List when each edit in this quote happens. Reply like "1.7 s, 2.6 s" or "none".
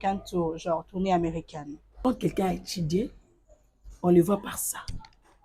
2.0 s